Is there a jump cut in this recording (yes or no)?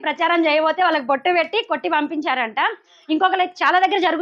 no